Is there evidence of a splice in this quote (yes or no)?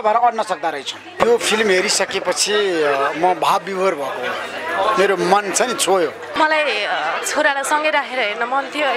yes